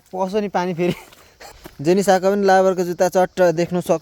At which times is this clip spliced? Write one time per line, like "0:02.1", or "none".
0:01.5